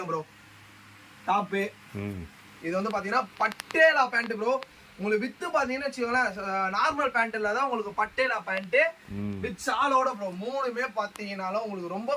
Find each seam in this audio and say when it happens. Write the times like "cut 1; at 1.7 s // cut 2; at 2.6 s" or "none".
none